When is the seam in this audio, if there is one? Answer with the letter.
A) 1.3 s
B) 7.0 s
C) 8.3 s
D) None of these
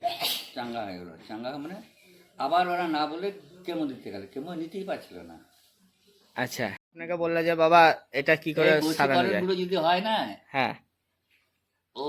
B